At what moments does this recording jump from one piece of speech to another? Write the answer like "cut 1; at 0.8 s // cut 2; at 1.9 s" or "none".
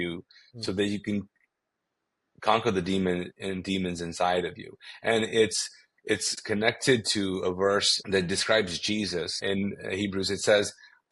cut 1; at 6.3 s // cut 2; at 8.0 s // cut 3; at 9.4 s